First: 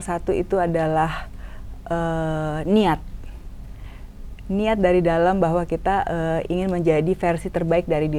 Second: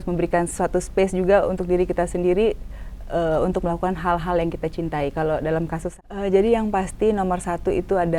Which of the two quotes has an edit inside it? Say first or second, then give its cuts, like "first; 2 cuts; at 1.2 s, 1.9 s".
second; 1 cut; at 5.9 s